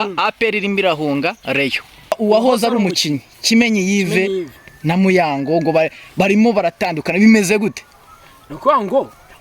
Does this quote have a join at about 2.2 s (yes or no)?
yes